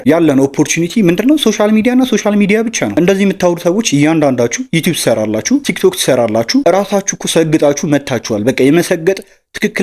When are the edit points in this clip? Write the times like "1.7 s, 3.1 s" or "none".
2.9 s

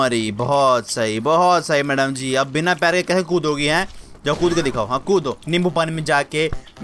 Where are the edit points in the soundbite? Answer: 5.4 s

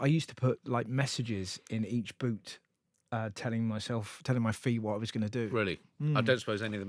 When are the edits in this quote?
none

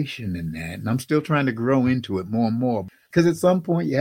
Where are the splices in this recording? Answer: 3.1 s

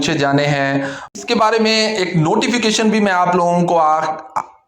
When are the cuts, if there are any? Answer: 1.1 s

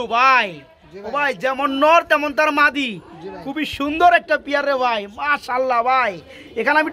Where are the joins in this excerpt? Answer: none

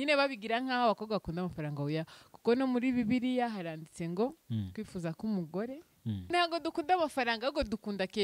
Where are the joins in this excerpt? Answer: 6.3 s

